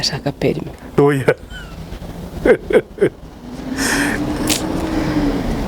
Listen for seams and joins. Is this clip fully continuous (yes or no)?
yes